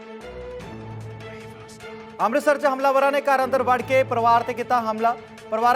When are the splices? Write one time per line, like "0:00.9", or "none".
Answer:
0:01.2